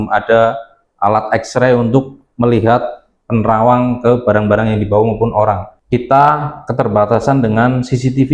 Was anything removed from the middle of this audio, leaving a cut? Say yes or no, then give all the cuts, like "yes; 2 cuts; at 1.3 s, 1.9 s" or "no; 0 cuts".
yes; 1 cut; at 5.7 s